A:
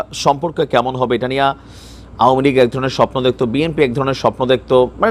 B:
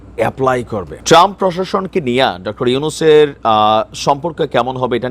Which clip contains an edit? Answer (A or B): B